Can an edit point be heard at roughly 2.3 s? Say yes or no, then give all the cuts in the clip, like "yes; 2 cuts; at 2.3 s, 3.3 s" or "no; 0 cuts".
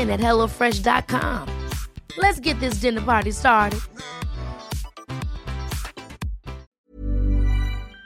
no; 1 cut; at 6.7 s